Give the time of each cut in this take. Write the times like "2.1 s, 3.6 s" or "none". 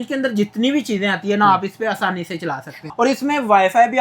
2.8 s